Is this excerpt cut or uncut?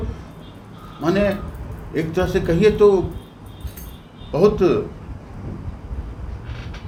uncut